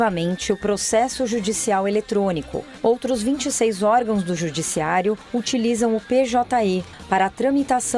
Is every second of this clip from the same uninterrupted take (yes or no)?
no